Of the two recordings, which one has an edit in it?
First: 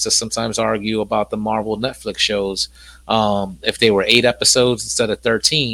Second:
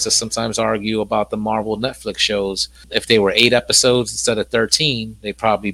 second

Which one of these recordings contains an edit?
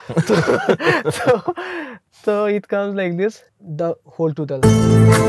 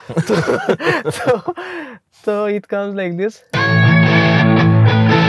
first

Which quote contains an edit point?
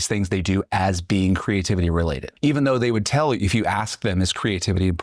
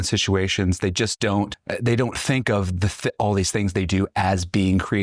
second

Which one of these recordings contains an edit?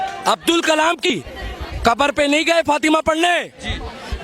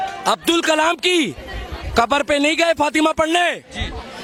first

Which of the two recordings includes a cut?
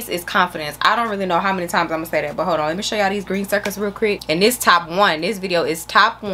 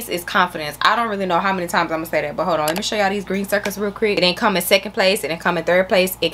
second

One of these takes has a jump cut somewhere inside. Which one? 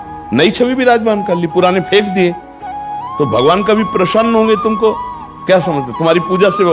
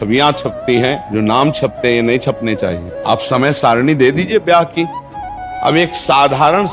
second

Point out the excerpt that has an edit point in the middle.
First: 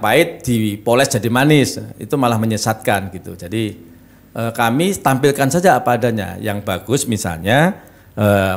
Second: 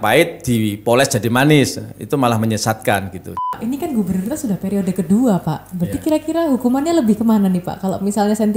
second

